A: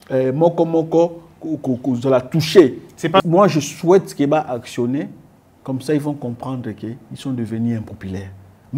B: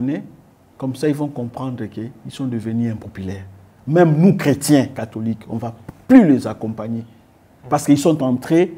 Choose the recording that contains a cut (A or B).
A